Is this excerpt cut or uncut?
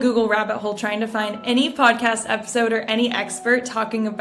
uncut